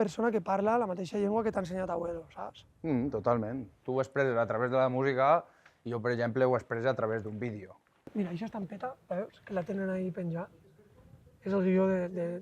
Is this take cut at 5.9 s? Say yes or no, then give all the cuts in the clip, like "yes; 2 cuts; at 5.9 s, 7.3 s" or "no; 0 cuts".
no; 2 cuts; at 3.8 s, 8.1 s